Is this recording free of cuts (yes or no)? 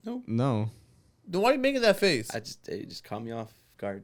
yes